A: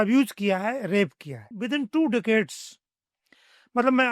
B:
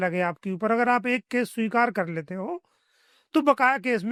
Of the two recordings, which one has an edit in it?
A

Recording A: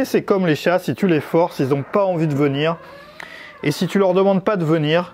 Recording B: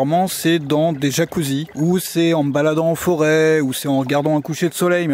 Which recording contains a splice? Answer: B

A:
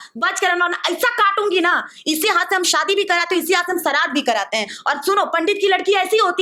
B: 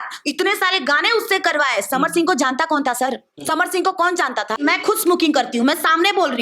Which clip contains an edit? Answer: B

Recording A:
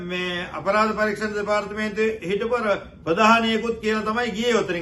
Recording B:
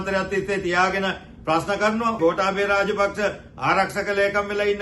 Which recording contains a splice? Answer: B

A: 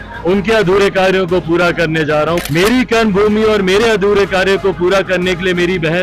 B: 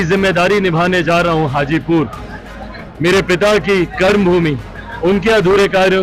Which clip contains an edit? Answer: A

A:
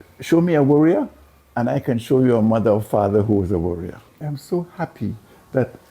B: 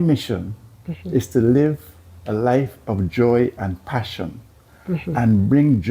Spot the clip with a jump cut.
A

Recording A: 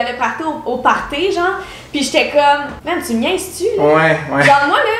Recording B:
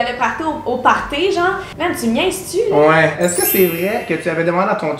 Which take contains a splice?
B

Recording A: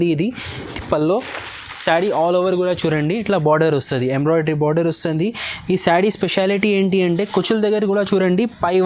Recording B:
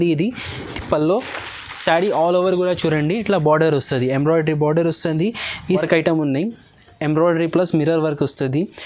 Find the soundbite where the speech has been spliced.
B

